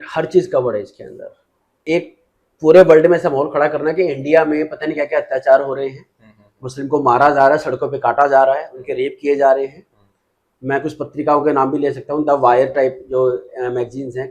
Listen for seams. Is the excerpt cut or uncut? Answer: cut